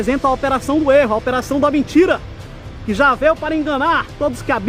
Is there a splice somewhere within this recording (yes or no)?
no